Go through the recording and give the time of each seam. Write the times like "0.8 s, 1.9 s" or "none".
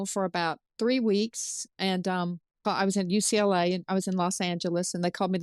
2.6 s